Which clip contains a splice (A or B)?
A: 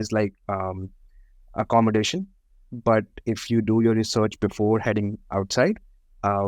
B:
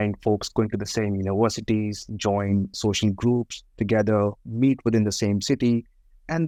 A